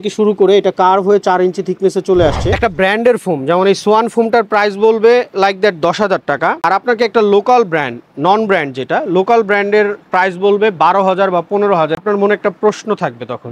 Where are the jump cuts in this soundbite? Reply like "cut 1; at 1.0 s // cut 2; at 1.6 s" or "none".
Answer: cut 1; at 2.4 s // cut 2; at 12.0 s

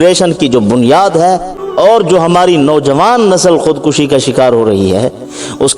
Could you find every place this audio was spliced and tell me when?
cut 1; at 1.6 s

